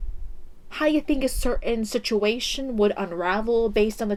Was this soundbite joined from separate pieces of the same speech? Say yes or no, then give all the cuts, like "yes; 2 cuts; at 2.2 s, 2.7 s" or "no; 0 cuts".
no; 0 cuts